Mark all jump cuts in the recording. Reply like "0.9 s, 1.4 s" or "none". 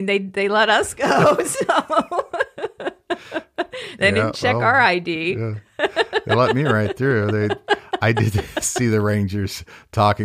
none